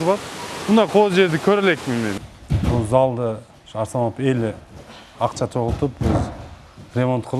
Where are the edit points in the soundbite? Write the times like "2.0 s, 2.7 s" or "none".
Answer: 2.1 s